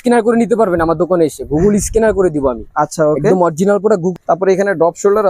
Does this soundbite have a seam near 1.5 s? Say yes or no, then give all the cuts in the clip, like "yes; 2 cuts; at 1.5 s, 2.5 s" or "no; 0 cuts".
no; 1 cut; at 4.0 s